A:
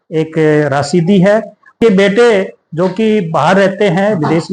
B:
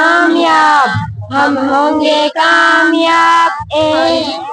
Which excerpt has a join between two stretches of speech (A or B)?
A